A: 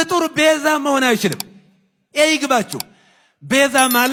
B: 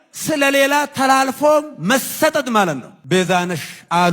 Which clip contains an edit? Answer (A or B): B